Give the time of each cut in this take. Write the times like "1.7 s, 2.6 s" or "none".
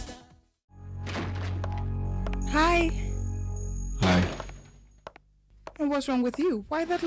2.3 s